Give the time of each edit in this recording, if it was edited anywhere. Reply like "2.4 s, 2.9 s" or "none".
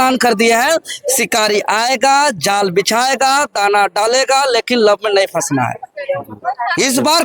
none